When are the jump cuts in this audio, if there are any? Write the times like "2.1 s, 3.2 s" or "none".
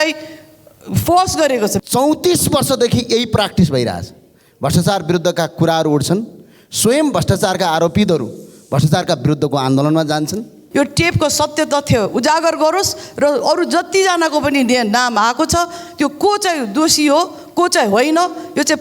1.8 s, 10.6 s